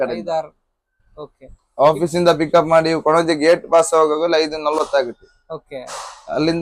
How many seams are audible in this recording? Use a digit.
0